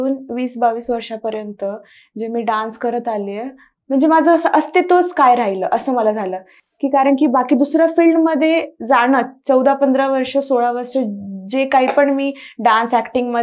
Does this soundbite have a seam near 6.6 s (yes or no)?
no